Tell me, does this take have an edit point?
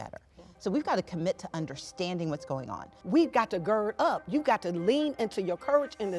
yes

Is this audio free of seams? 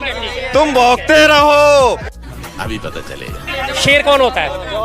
no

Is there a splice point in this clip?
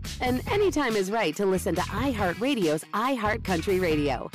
no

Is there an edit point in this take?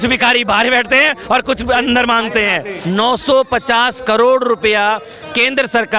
yes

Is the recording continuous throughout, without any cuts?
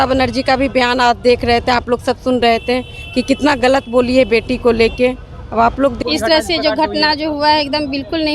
no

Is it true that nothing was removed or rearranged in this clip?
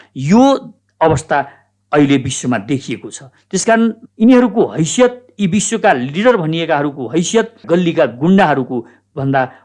no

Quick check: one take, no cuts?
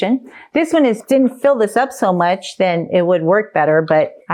no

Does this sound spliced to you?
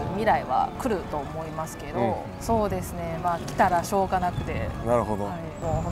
no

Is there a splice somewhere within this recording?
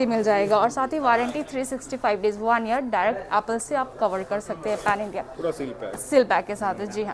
no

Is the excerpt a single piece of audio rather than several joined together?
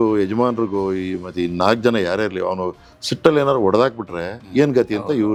yes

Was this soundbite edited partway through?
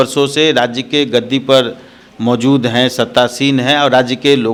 no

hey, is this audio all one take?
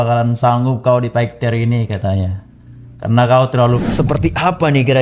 no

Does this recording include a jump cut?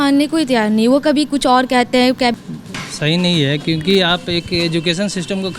yes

